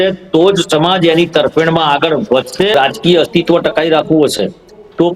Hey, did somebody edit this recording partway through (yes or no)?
yes